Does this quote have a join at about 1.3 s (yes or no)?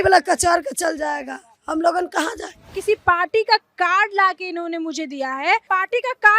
no